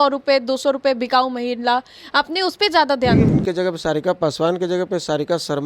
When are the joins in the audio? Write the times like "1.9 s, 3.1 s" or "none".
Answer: 3.3 s